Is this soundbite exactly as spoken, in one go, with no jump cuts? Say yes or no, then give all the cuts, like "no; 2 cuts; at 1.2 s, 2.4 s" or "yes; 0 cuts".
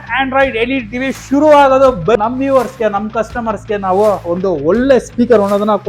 no; 1 cut; at 2.2 s